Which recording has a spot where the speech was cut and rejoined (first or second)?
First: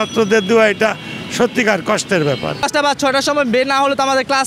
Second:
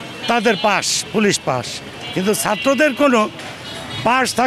first